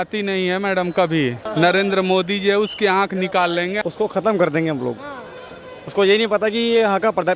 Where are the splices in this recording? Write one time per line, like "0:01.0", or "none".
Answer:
0:01.4
0:03.8